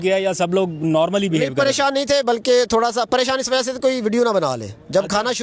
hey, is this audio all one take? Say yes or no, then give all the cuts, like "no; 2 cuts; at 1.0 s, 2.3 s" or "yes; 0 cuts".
yes; 0 cuts